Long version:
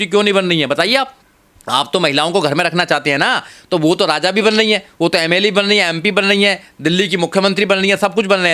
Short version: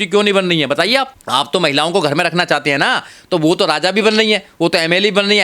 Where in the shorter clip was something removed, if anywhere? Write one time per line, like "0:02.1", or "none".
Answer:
0:01.2